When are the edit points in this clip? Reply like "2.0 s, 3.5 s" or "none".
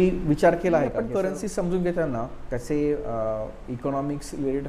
1.1 s

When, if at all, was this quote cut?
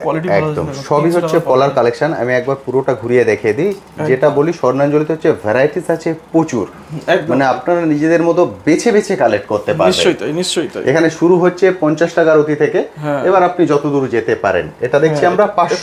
none

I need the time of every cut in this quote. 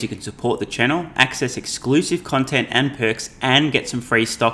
none

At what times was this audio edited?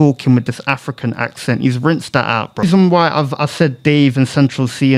2.6 s

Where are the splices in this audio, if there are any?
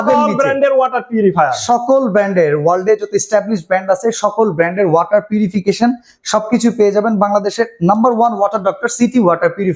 none

